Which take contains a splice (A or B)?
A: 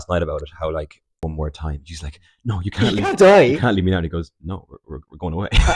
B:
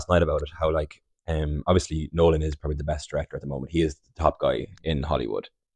A